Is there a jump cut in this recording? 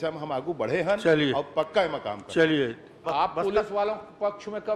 yes; 1 cut; at 3.0 s

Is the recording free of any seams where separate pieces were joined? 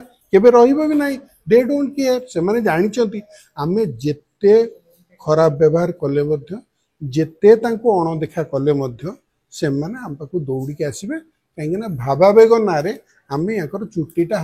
yes; 0 cuts

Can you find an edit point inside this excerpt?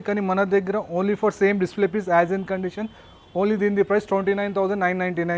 no; 0 cuts

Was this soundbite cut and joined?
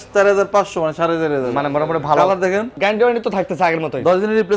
yes; 1 cut; at 2.8 s

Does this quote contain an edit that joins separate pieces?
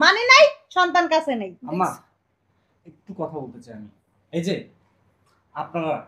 no; 0 cuts

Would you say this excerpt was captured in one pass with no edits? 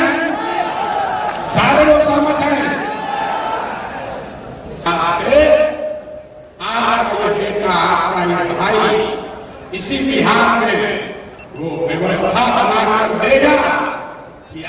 no; 1 cut; at 4.8 s

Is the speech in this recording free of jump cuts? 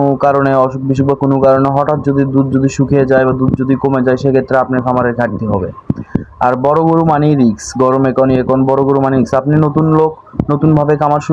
yes; 0 cuts

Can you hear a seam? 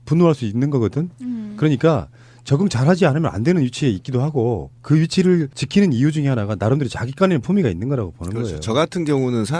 yes; 1 cut; at 6.7 s

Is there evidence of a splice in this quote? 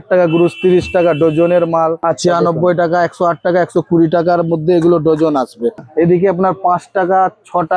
yes; 2 cuts; at 2.0 s, 5.9 s

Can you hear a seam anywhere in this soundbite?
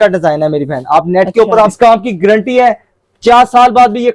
yes; 1 cut; at 1.7 s

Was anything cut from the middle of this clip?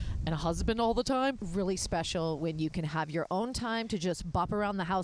yes; 1 cut; at 1.4 s

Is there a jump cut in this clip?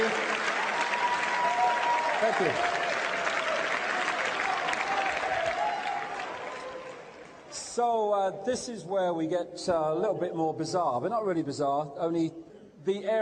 no; 0 cuts

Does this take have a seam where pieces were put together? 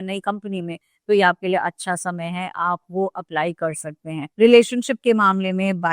no; 0 cuts

